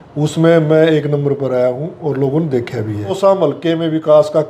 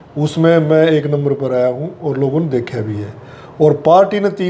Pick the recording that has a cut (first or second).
first